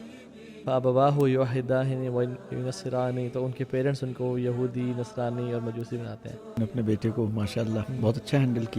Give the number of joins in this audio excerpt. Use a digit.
1